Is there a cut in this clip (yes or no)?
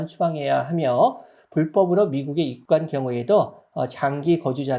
yes